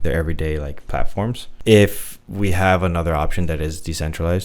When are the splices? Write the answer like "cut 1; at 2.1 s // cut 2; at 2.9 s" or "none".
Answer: cut 1; at 1.5 s